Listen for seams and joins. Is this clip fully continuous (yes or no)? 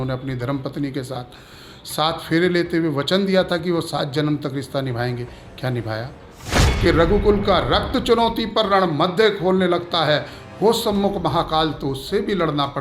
no